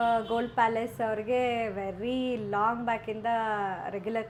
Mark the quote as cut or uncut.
uncut